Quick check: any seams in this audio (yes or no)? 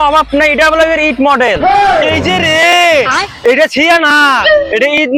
no